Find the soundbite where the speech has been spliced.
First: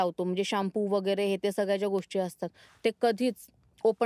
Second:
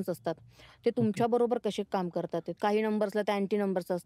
second; 1 cut; at 2.5 s

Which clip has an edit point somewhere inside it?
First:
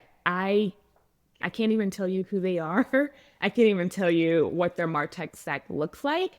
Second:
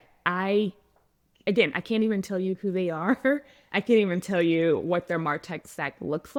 first; 1 cut; at 1.4 s

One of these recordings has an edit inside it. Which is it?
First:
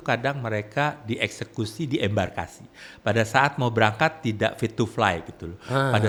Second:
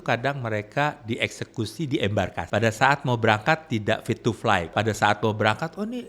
second; 2 cuts; at 2.4 s, 4.7 s

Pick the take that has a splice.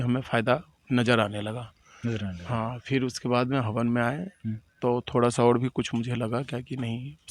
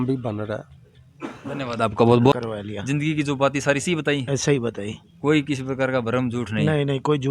second; 1 cut; at 2.3 s

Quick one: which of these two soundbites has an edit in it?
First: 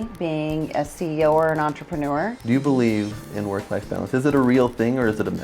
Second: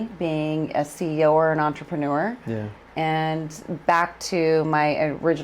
first; 1 cut; at 2.4 s

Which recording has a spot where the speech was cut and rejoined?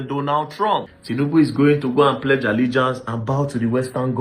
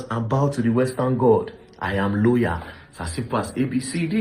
first; 1 cut; at 0.9 s

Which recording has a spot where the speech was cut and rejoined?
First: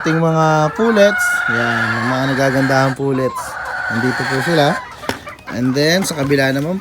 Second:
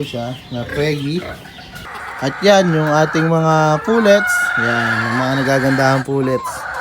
second; 1 cut; at 1.8 s

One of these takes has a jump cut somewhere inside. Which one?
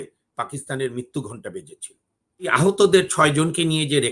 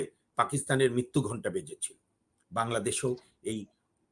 first; 1 cut; at 2.5 s

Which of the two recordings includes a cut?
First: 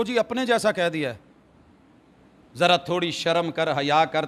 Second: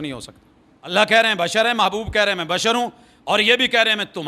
second; 1 cut; at 0.9 s

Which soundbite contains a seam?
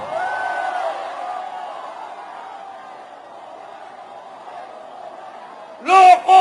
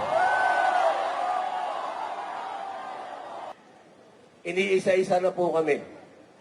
second; 1 cut; at 3.5 s

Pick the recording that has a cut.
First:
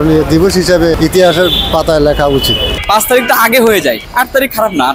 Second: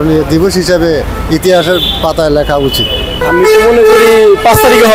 first; 3 cuts; at 1.0 s, 2.7 s, 4.0 s

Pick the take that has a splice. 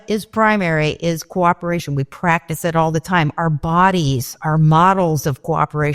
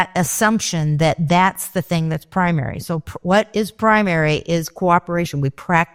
first; 1 cut; at 4.3 s

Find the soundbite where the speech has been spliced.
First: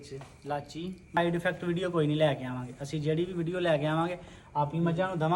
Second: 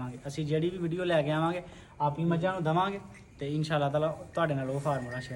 first; 1 cut; at 1.2 s

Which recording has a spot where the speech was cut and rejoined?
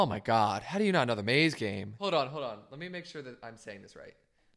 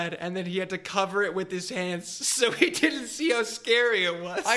first; 1 cut; at 2.0 s

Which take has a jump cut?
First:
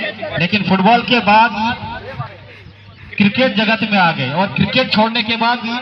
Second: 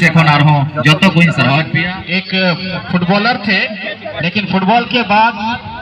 second; 1 cut; at 1.9 s

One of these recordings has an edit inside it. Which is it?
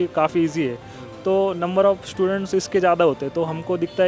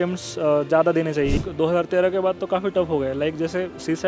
second; 1 cut; at 1.4 s

